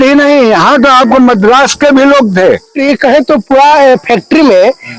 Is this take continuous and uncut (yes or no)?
no